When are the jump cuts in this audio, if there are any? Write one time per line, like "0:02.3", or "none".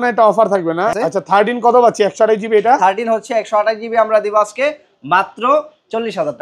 0:00.9